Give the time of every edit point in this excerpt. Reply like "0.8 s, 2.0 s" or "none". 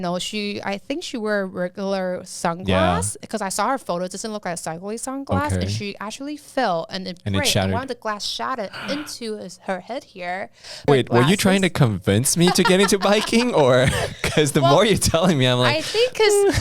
10.9 s